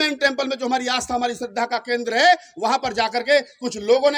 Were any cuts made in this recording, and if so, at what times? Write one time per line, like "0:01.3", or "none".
none